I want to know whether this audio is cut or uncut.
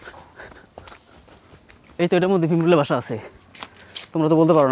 uncut